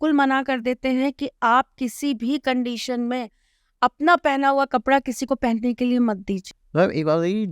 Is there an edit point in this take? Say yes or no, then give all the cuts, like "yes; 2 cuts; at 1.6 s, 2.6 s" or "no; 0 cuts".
yes; 1 cut; at 6.5 s